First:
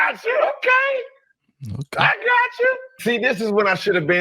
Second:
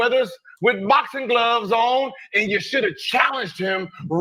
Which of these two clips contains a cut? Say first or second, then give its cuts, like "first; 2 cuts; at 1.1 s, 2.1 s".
first; 1 cut; at 2.9 s